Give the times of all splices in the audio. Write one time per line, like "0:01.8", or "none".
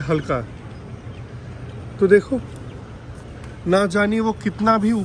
none